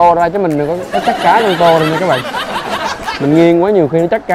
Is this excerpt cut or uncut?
uncut